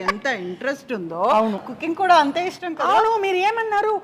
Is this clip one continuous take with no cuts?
no; 1 cut; at 1.6 s

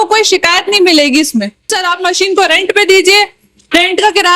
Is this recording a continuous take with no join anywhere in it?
no; 1 cut; at 1.8 s

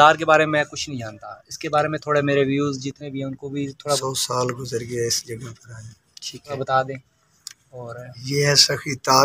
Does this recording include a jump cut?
yes; 2 cuts; at 4.0 s, 6.6 s

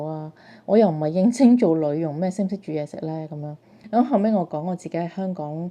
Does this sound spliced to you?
yes; 1 cut; at 3.7 s

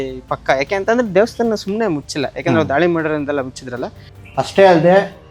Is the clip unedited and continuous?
no; 1 cut; at 4.2 s

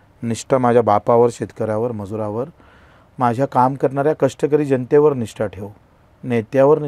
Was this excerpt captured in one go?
yes; 0 cuts

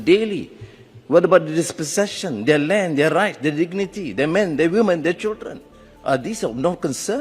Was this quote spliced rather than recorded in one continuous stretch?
no; 0 cuts

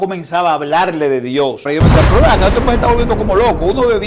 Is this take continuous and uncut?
no; 1 cut; at 1.7 s

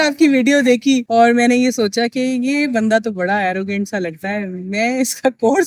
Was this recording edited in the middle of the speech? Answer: no; 0 cuts

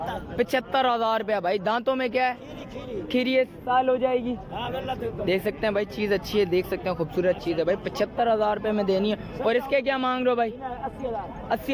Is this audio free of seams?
yes; 0 cuts

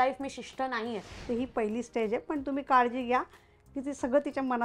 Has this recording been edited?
yes; 1 cut; at 1.1 s

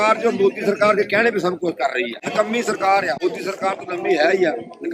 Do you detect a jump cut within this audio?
yes; 2 cuts; at 2.2 s, 3.2 s

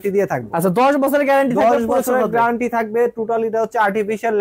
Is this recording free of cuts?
yes; 0 cuts

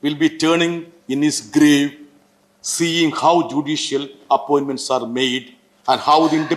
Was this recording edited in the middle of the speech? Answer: no; 0 cuts

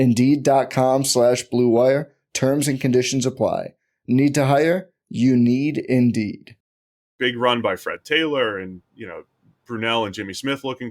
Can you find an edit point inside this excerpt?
yes; 1 cut; at 7.0 s

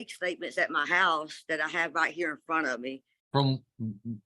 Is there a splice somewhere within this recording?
yes; 1 cut; at 3.1 s

